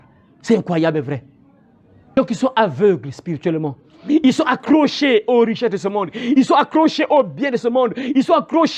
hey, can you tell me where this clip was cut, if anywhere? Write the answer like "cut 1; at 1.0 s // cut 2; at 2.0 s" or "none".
cut 1; at 2.1 s